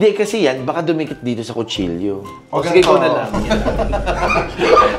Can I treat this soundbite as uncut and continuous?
yes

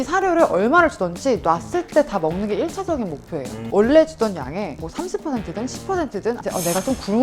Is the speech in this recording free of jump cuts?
no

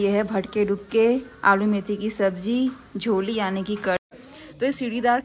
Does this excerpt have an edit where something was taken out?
yes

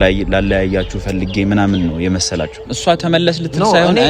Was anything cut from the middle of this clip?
yes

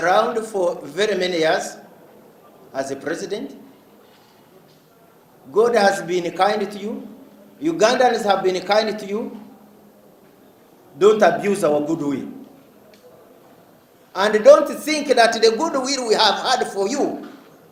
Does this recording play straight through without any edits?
yes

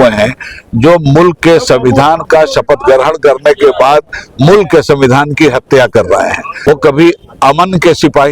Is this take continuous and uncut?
no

